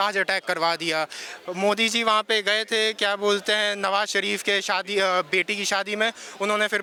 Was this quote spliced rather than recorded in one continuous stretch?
no; 0 cuts

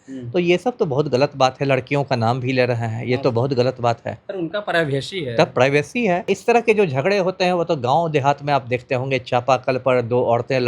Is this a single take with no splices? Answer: no; 1 cut; at 6.3 s

